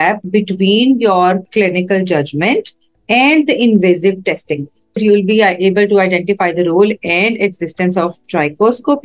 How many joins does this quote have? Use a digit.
1